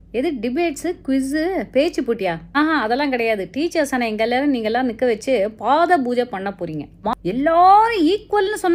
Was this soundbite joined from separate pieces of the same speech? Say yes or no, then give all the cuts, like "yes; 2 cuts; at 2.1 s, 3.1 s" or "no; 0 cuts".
yes; 1 cut; at 7.0 s